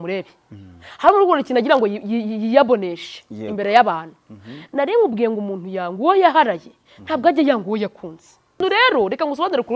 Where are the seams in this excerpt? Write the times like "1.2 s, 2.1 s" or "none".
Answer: 8.6 s